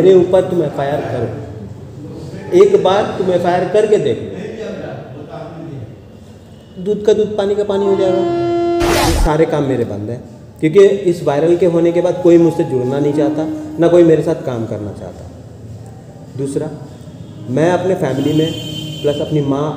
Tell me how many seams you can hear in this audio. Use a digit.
1